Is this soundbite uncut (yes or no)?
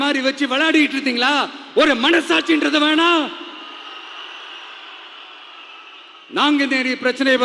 yes